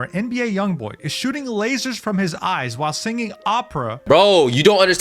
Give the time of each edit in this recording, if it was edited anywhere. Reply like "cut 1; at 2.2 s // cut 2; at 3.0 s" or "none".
cut 1; at 4.0 s